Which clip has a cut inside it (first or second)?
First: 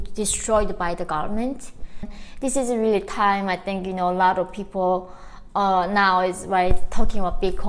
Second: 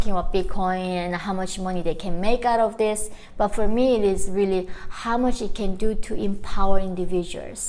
first